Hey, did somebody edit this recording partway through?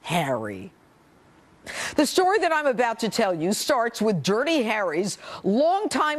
yes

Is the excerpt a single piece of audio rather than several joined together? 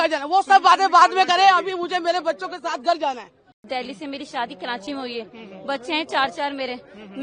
no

